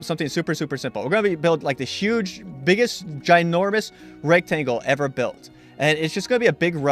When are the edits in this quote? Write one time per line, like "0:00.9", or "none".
none